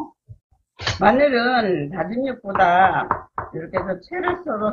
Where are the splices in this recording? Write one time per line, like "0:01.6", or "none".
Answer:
none